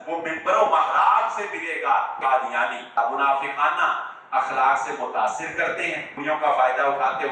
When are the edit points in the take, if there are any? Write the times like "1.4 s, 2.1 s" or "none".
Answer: 2.6 s, 6.1 s